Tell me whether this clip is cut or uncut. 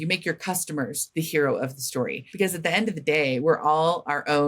cut